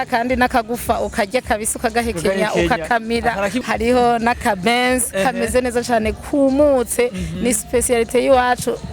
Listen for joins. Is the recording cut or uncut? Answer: cut